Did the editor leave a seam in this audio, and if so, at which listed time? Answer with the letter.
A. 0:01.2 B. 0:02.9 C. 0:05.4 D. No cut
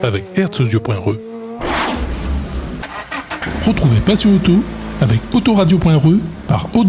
B